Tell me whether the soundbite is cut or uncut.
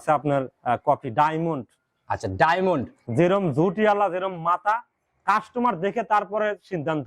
uncut